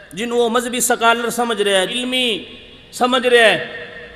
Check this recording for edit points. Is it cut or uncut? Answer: cut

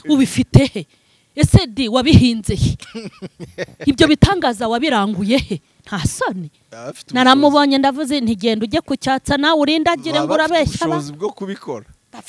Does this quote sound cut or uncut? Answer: uncut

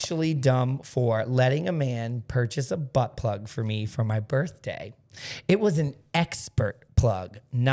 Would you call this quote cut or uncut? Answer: uncut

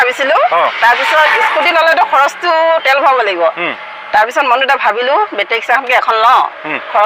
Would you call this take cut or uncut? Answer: uncut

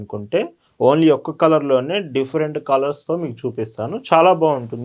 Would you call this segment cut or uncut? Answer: uncut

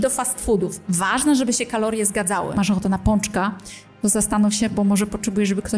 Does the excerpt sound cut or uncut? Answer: cut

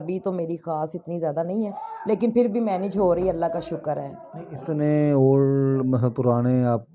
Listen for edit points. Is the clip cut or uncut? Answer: uncut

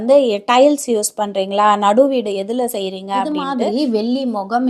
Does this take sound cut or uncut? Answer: cut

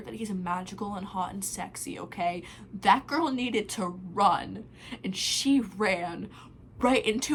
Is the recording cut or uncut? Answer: uncut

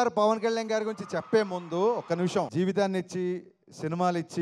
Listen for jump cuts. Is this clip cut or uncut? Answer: cut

